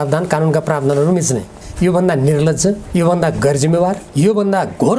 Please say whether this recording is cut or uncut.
cut